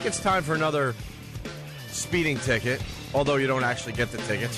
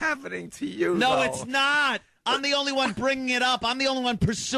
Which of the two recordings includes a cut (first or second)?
second